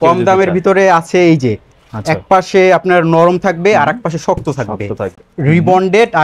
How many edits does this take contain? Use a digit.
1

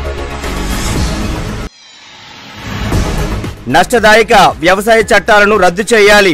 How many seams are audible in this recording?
2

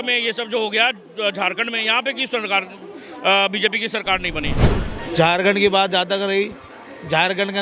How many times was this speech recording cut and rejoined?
1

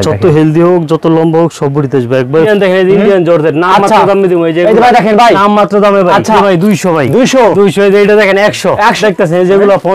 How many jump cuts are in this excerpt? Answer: 3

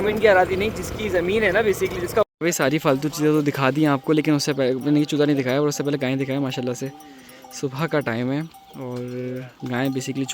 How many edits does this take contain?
1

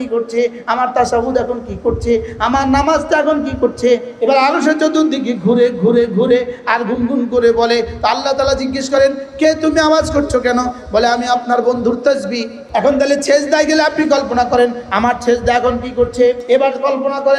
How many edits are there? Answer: 3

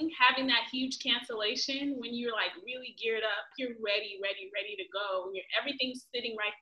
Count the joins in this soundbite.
1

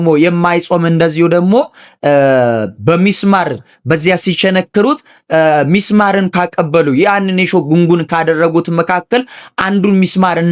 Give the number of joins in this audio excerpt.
0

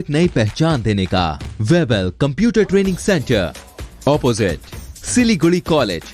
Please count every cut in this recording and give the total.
1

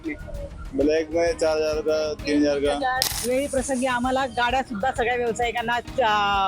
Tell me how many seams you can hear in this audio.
1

